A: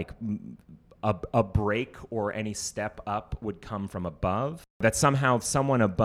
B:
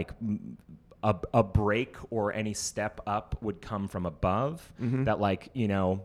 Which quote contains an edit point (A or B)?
A